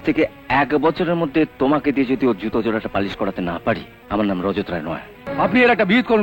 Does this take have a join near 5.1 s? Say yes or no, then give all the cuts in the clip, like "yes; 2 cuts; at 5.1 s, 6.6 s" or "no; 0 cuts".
yes; 2 cuts; at 3.9 s, 5.1 s